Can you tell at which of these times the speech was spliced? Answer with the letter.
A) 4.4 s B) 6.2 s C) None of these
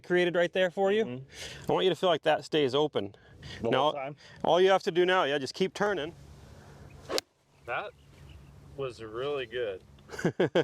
B